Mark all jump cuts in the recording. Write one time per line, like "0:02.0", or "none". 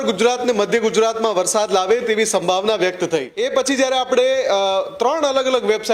0:03.3